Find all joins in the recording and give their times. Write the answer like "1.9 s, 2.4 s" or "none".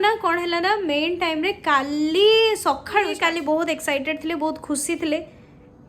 3.1 s